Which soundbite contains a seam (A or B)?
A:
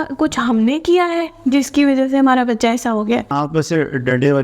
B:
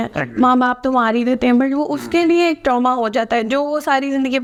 A